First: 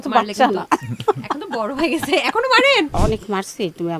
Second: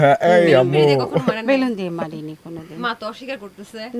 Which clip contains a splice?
first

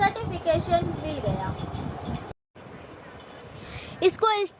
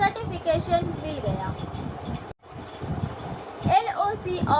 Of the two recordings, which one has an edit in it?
second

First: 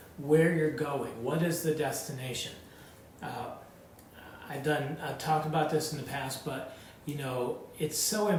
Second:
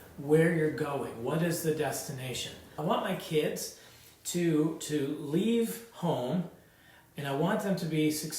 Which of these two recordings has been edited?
second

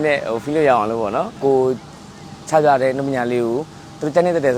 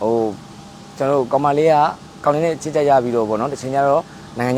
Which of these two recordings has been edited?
first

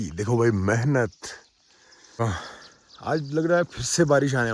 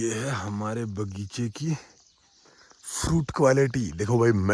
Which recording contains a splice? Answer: first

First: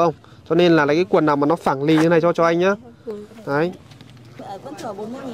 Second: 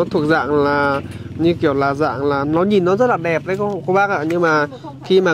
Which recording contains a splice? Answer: first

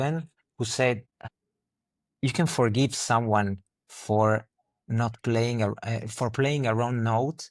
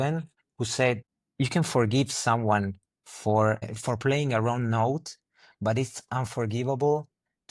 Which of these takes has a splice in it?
second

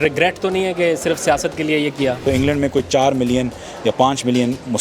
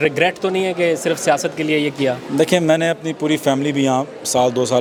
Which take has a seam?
first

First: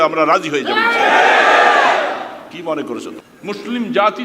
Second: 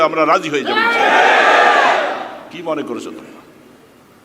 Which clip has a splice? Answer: first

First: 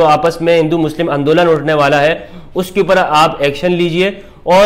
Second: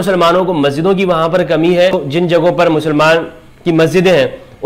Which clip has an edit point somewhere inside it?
second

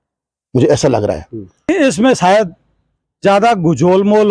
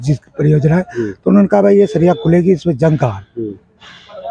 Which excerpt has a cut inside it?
first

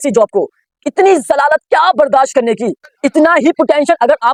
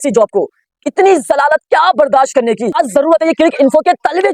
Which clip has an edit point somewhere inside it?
second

